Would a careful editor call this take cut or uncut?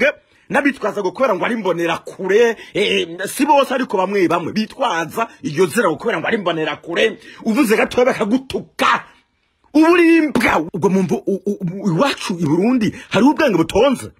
cut